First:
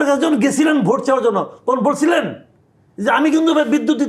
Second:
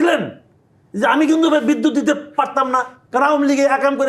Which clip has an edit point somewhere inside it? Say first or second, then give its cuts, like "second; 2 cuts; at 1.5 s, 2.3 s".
second; 1 cut; at 3.0 s